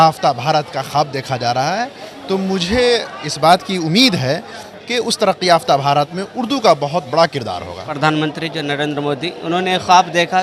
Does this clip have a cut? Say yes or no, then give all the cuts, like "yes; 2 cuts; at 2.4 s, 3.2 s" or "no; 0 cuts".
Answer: yes; 1 cut; at 7.9 s